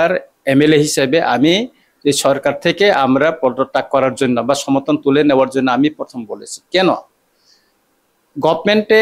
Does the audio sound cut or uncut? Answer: uncut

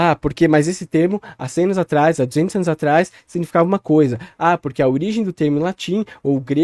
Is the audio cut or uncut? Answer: uncut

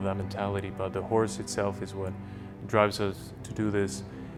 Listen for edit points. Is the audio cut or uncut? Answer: uncut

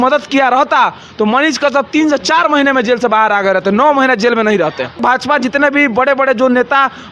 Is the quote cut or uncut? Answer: cut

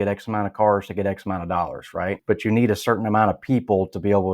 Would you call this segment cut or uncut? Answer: cut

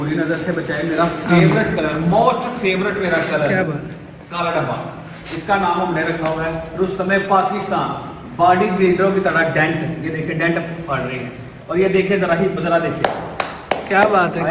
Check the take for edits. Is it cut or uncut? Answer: uncut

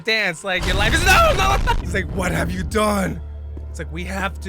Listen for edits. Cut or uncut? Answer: cut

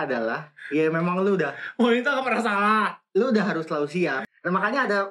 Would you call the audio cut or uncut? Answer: cut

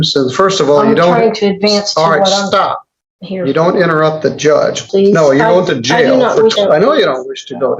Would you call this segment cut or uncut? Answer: cut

